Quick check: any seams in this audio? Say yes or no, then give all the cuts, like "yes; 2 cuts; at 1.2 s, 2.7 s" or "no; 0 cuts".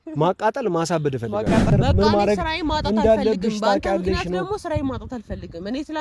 yes; 1 cut; at 1.7 s